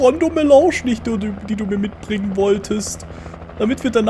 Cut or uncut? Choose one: uncut